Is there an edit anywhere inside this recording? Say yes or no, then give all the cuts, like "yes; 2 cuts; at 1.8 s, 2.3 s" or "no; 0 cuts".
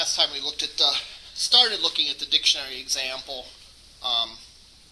no; 0 cuts